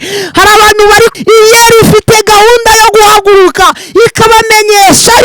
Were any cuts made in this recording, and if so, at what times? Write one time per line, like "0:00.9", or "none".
0:01.1

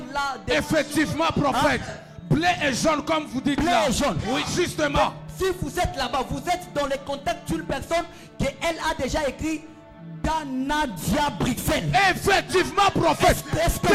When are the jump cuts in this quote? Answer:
none

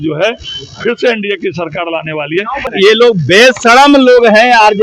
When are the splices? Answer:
0:02.7

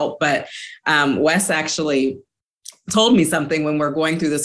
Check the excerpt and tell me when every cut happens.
none

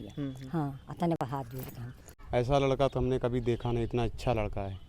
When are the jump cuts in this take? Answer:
0:02.1

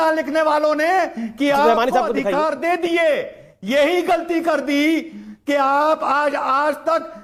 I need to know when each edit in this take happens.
none

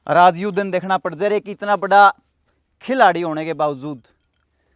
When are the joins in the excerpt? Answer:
none

